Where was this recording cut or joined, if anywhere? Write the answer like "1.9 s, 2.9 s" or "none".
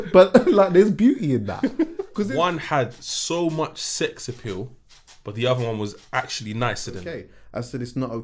2.1 s, 7.3 s